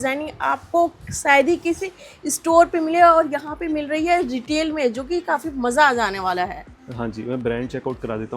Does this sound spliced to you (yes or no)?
no